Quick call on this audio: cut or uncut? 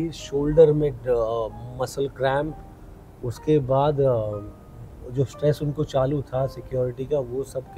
uncut